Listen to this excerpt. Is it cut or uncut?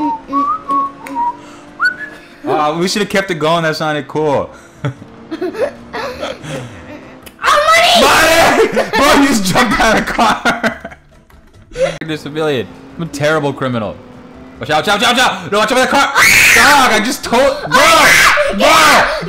cut